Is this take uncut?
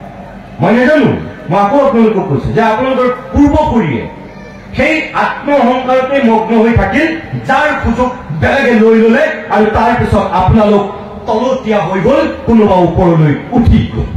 yes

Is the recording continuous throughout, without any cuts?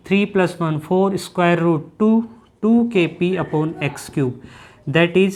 yes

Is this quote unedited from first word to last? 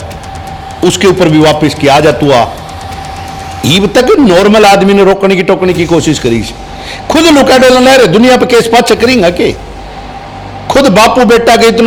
yes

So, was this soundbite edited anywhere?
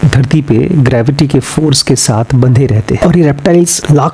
yes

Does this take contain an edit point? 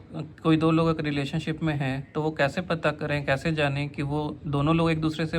no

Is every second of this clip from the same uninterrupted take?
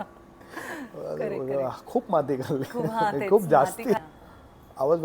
no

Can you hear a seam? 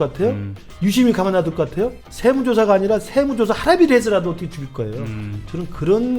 yes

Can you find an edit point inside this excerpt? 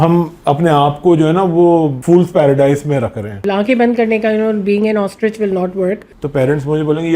yes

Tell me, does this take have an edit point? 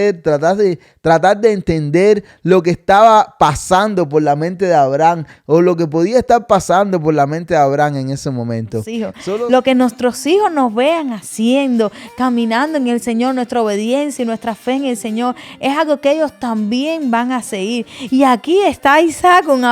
yes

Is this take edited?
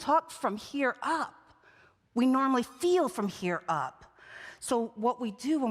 no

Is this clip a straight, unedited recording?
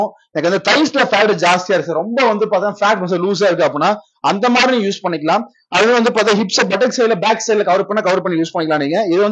yes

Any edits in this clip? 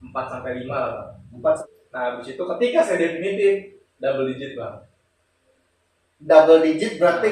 yes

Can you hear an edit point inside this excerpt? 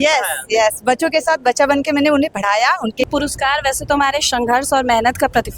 yes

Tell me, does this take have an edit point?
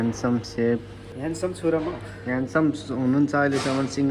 yes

